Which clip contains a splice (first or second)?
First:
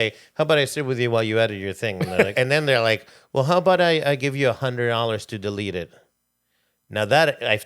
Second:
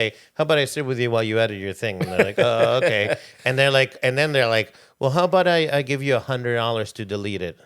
first